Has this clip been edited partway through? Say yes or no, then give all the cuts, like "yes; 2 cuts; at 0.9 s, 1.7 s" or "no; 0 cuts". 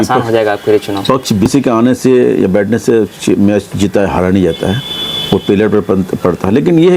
yes; 1 cut; at 1.5 s